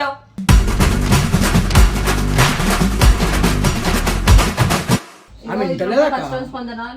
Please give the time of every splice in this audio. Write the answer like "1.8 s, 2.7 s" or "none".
5.2 s